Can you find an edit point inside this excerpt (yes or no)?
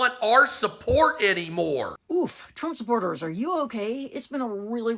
yes